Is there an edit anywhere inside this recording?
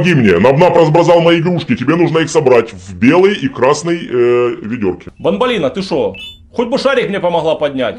yes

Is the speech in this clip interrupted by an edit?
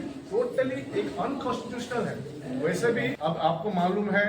yes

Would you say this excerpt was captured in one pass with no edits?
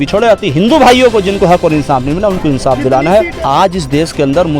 no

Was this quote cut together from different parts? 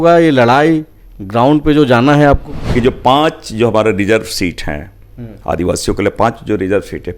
yes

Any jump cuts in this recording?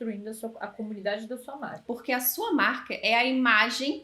yes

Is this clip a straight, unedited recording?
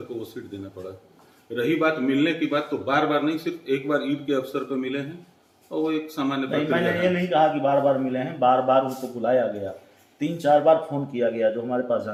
yes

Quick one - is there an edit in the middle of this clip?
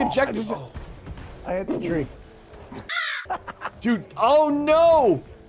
no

